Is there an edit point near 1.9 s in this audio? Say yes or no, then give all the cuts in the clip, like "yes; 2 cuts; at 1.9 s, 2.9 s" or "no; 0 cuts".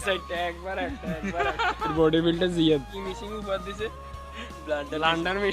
yes; 1 cut; at 1.9 s